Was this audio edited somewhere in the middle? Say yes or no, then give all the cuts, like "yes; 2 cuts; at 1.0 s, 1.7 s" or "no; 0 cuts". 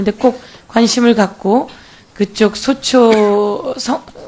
no; 0 cuts